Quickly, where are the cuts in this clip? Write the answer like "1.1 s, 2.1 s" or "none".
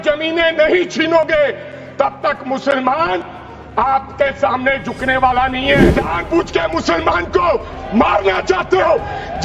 5.9 s